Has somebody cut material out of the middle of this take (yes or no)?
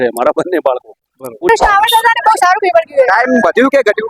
yes